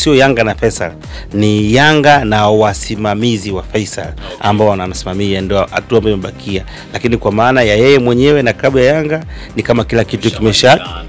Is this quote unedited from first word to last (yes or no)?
yes